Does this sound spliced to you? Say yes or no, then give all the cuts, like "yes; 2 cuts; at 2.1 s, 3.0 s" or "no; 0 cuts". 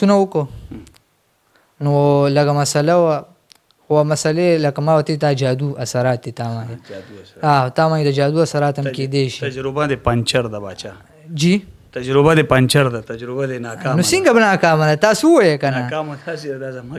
no; 0 cuts